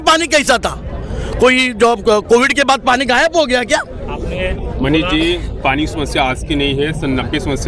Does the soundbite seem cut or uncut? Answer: uncut